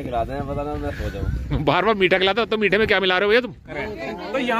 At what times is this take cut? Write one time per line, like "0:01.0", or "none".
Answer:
0:03.7